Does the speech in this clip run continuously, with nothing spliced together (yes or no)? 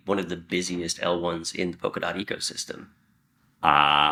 yes